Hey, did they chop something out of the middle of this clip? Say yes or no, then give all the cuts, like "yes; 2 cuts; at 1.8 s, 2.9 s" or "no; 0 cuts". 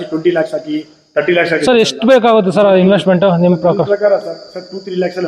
no; 0 cuts